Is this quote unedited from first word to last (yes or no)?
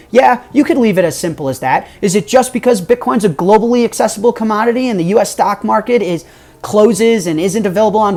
yes